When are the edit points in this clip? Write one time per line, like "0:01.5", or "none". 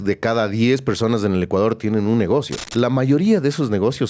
0:02.7